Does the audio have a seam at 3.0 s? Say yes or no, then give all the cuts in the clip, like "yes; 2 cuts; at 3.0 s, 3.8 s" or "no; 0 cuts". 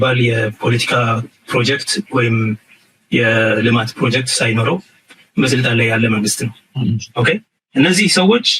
no; 1 cut; at 6.7 s